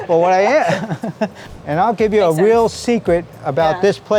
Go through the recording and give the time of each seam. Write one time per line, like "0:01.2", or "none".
0:01.4